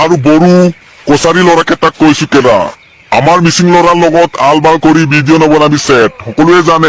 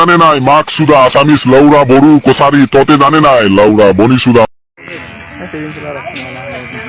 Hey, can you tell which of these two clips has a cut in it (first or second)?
second